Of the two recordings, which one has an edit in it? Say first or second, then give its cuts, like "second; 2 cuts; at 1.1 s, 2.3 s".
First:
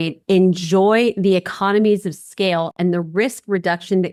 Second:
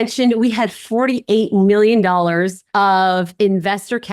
second; 1 cut; at 2.6 s